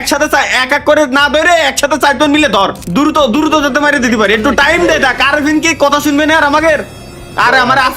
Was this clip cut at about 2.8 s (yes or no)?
yes